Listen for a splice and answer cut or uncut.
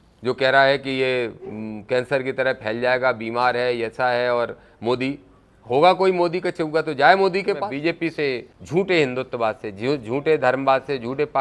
cut